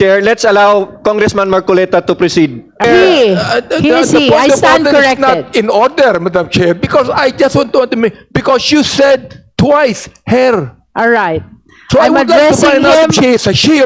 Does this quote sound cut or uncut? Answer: cut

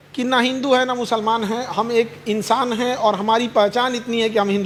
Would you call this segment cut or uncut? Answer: uncut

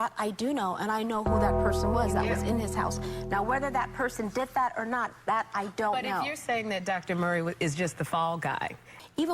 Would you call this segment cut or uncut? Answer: uncut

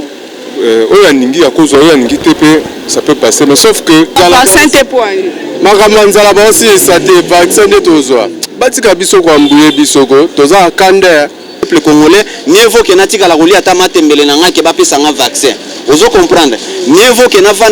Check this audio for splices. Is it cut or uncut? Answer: cut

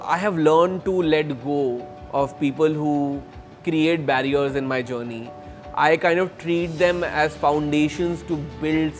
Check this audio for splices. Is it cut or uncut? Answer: uncut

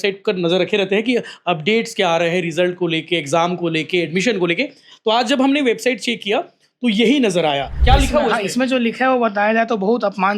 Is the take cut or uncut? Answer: cut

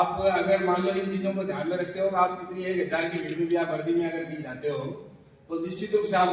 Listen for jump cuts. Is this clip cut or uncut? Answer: uncut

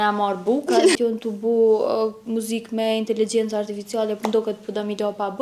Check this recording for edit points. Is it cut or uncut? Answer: cut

